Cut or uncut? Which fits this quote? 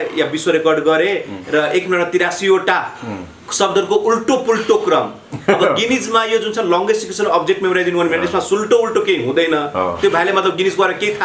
uncut